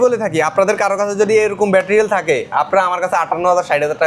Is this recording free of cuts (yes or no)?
yes